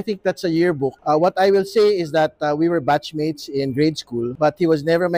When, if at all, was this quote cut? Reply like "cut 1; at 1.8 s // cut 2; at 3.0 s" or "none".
cut 1; at 1.0 s // cut 2; at 4.3 s

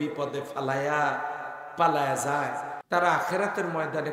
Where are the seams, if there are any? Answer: cut 1; at 2.7 s

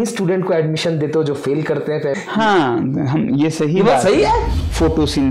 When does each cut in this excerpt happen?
cut 1; at 2.1 s // cut 2; at 4.5 s

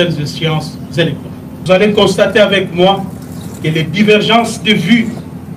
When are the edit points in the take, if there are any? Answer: cut 1; at 1.6 s

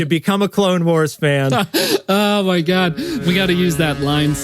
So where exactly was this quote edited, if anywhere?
cut 1; at 3.2 s

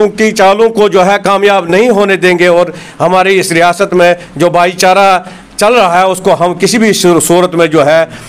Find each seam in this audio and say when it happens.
none

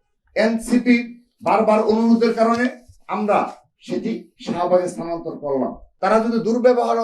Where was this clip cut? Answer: cut 1; at 5.8 s

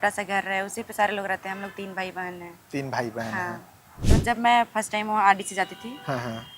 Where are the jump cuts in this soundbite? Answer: cut 1; at 4.0 s

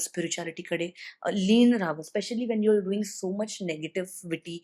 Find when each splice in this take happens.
none

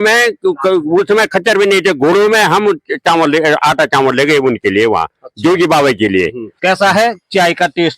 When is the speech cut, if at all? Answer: cut 1; at 6.5 s

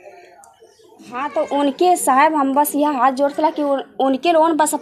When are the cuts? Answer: cut 1; at 1.2 s

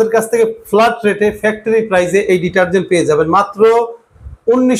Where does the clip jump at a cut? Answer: none

